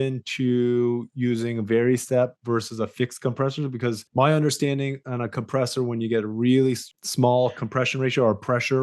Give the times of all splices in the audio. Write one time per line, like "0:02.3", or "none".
0:04.0
0:06.9